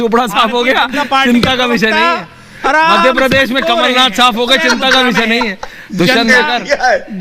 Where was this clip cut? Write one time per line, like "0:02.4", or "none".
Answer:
none